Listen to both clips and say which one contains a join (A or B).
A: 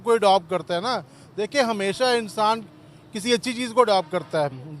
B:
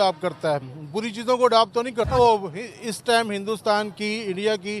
B